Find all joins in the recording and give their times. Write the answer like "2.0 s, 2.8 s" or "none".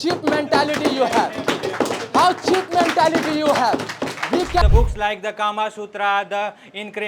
4.6 s